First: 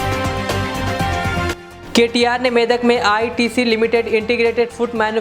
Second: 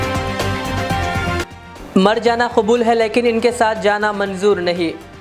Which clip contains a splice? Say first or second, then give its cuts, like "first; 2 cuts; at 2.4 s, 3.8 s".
first; 1 cut; at 1.5 s